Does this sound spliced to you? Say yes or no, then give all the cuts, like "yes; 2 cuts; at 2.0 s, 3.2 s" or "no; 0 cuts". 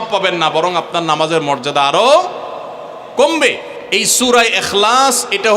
yes; 1 cut; at 3.7 s